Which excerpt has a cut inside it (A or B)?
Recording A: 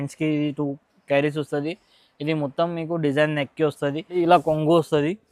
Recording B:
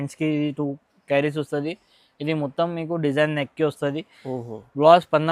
A